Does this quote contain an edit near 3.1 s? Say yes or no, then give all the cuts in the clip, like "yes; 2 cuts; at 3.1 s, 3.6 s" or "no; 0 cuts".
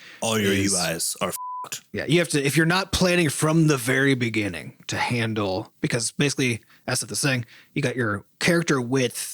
no; 1 cut; at 1.5 s